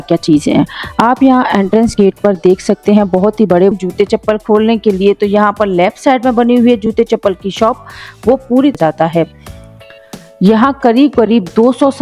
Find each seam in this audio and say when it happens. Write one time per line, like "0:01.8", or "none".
0:03.7
0:08.8